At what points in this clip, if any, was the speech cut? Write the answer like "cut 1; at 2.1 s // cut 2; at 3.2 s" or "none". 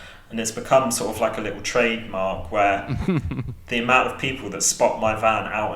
none